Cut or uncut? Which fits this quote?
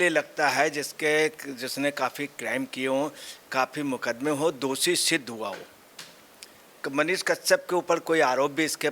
uncut